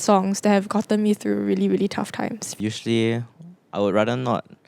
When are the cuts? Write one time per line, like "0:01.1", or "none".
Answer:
0:02.5